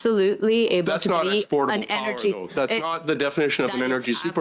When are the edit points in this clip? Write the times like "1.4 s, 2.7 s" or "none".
none